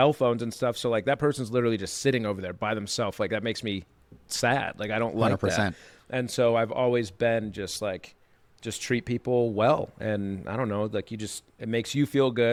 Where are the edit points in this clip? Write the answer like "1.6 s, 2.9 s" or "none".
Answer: none